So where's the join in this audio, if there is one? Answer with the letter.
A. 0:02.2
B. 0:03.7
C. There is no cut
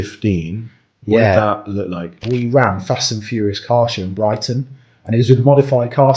A